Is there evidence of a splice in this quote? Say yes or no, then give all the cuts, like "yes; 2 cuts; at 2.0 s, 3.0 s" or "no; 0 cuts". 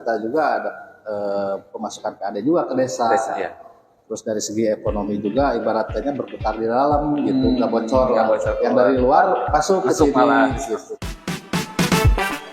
yes; 1 cut; at 11.0 s